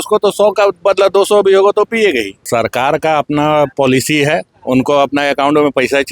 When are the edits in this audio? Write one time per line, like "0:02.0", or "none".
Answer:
0:02.4
0:04.5